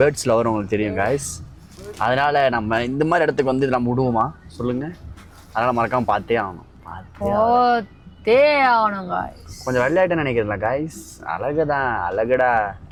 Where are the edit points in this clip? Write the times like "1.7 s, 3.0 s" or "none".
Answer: none

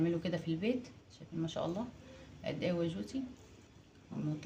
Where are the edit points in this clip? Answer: none

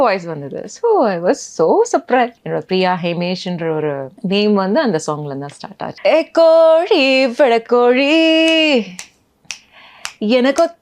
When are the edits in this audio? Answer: 2.4 s, 4.1 s, 5.9 s

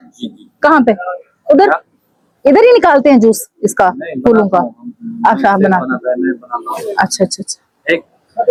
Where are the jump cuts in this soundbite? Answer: none

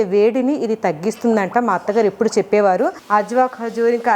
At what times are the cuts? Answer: 3.0 s

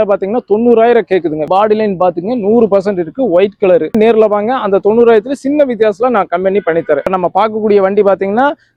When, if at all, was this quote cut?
none

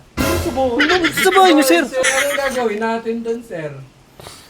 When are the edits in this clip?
2.1 s

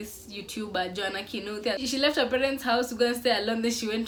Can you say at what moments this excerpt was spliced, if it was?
none

